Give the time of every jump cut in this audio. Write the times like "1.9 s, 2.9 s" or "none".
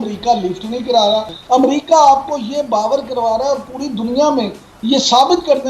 1.3 s